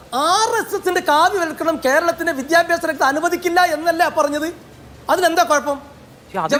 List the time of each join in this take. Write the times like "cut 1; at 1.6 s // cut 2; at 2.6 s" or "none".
none